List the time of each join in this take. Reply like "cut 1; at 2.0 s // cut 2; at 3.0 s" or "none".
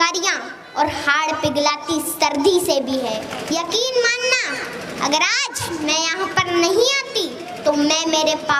cut 1; at 3.3 s